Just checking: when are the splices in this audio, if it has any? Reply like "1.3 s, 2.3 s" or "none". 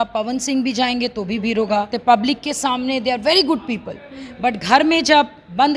1.9 s